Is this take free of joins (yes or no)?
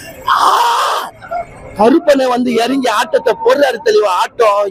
yes